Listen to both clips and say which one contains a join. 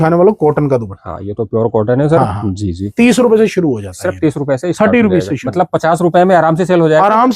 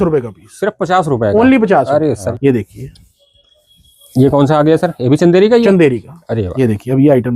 second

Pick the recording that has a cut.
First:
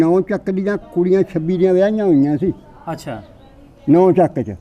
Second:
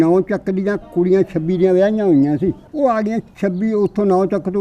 second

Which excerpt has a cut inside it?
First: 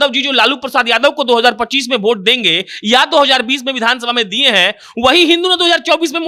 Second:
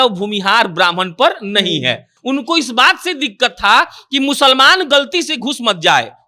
second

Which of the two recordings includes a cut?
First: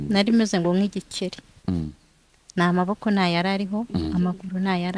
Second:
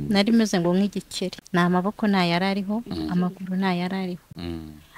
second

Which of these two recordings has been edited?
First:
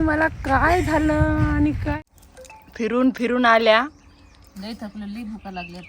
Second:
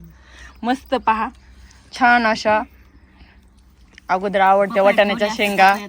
first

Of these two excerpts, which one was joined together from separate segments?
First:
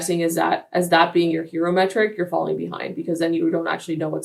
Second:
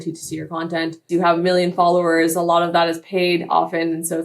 second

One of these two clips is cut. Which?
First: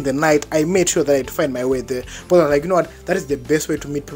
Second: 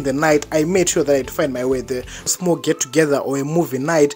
second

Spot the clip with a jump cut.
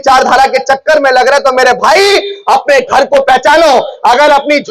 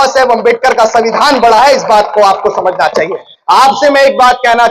second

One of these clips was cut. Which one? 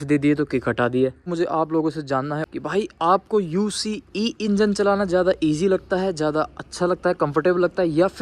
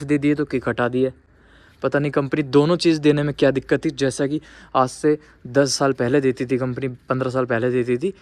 first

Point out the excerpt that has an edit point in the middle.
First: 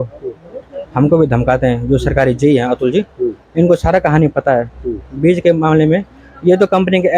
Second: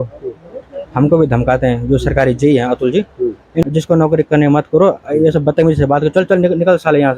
second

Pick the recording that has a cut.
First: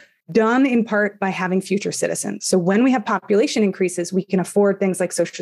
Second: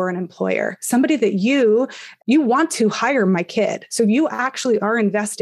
second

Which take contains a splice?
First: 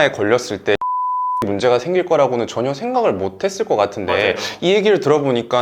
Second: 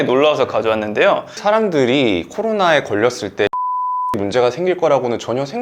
second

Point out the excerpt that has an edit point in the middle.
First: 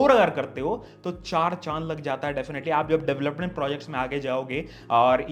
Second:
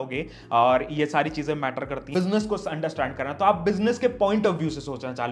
second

